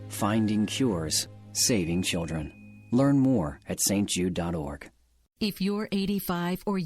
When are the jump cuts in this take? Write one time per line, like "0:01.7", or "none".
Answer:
0:04.9